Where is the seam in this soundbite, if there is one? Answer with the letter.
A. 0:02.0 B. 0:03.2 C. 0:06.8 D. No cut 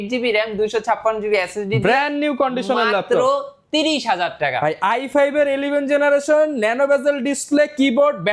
D